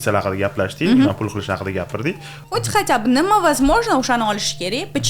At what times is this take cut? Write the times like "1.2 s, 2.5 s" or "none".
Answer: 2.3 s